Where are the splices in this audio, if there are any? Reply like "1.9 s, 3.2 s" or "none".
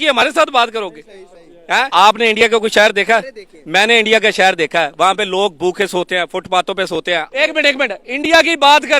1.9 s, 7.3 s